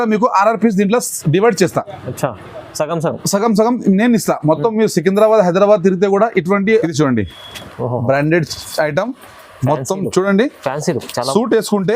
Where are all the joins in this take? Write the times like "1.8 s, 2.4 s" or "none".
6.8 s